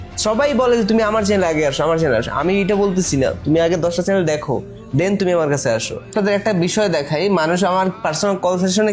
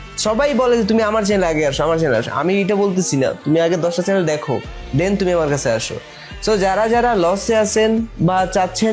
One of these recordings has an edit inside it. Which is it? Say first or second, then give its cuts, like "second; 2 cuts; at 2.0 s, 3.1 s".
first; 1 cut; at 6.1 s